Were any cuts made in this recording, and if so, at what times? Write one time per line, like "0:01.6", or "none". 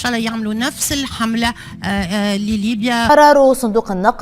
0:03.1